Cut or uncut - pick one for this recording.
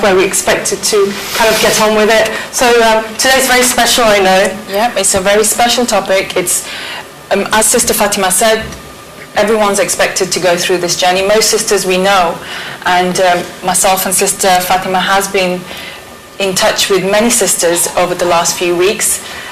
cut